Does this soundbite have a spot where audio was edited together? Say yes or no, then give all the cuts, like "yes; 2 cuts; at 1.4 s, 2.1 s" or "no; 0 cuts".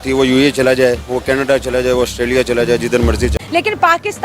yes; 1 cut; at 3.4 s